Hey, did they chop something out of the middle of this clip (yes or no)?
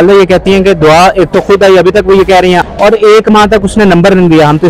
yes